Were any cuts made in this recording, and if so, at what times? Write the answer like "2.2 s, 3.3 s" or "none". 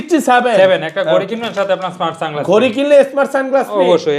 none